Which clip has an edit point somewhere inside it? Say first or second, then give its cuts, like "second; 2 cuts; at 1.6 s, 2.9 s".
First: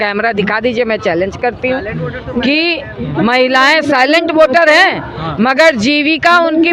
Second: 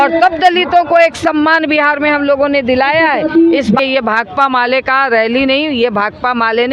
second; 1 cut; at 3.8 s